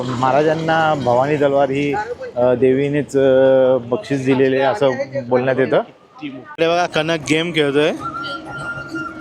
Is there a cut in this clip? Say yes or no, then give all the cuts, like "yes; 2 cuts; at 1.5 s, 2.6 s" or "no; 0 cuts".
yes; 1 cut; at 6.4 s